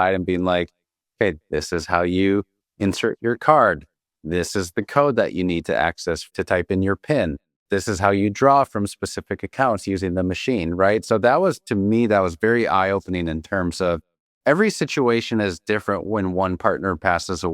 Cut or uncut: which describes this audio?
cut